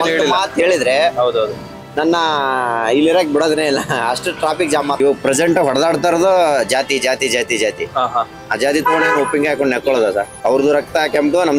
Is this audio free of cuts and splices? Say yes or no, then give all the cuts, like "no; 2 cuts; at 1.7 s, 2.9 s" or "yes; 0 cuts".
no; 2 cuts; at 5.0 s, 10.3 s